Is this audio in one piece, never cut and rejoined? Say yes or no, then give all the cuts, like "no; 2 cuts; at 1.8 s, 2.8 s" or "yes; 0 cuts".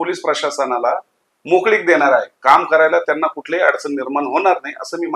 yes; 0 cuts